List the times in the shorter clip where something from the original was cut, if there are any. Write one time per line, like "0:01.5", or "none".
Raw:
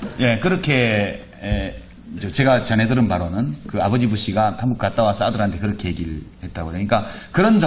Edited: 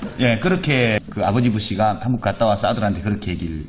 0:01.0